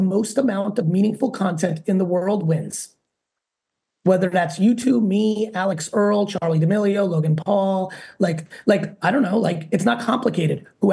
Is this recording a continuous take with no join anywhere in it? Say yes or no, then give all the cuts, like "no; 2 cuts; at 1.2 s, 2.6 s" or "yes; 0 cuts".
yes; 0 cuts